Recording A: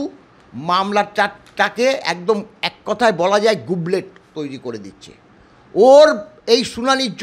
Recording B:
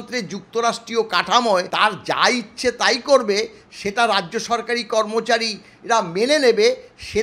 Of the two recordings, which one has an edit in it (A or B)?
B